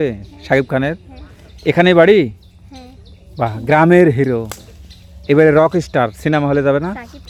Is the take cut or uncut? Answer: uncut